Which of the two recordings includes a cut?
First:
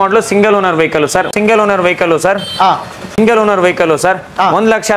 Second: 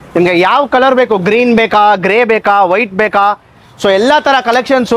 first; 2 cuts; at 1.3 s, 3.1 s

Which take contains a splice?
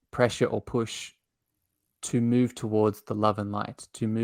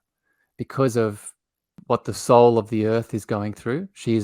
second; 1 cut; at 1.7 s

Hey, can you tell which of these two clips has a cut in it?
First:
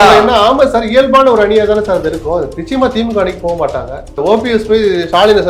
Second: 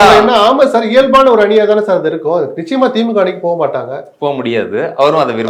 first; 1 cut; at 4.2 s

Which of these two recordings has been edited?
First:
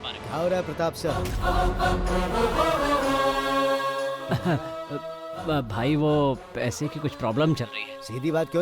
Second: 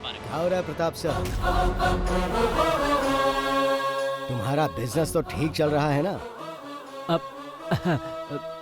first; 1 cut; at 4.2 s

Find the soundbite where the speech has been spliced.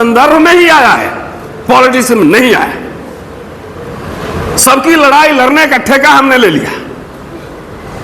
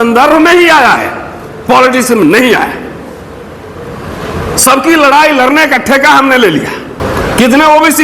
second; 1 cut; at 7.0 s

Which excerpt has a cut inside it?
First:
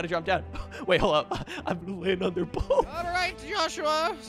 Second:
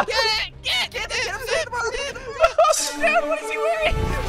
first; 1 cut; at 3.0 s

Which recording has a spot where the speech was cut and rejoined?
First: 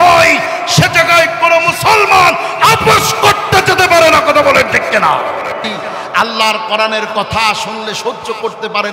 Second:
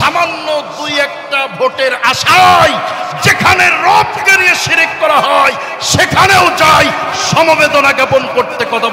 first; 1 cut; at 6.1 s

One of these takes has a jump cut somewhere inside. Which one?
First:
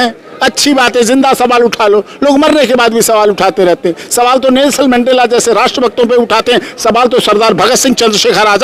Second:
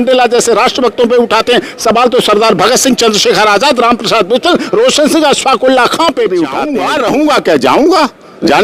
second; 1 cut; at 6.8 s

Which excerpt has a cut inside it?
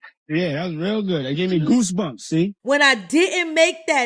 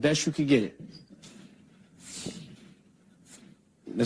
first; 1 cut; at 2.6 s

